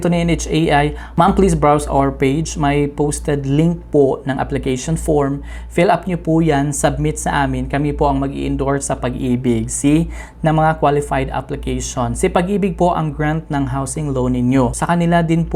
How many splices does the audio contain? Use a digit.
0